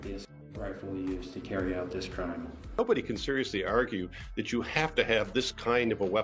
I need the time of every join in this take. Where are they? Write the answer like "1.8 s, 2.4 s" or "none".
2.8 s